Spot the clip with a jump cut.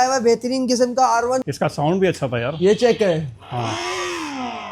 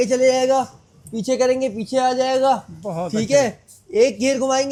first; 1 cut; at 1.5 s

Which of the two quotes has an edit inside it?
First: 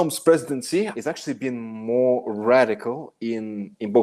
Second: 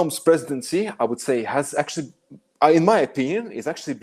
first; 1 cut; at 0.9 s

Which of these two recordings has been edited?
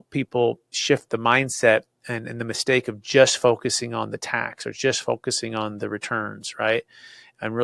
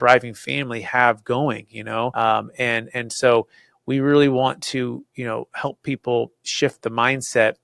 second; 1 cut; at 2.1 s

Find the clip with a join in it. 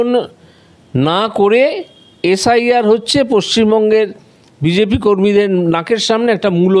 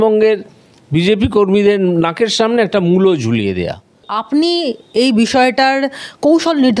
second; 1 cut; at 4.1 s

